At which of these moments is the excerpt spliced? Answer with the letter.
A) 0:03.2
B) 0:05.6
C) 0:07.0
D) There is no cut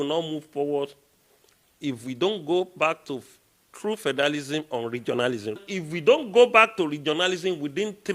B